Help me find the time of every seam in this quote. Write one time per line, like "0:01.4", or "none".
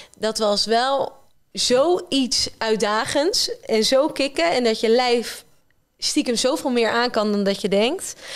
none